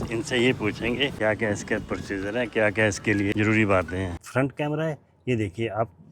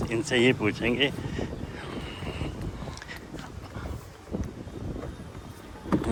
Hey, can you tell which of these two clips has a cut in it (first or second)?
first